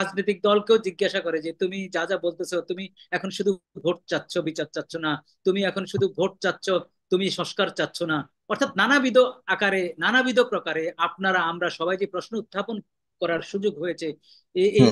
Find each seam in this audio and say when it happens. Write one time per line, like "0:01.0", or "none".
none